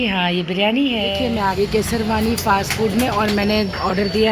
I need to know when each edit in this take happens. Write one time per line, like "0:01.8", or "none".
0:01.1